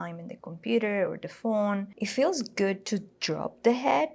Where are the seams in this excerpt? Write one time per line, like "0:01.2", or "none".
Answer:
0:02.0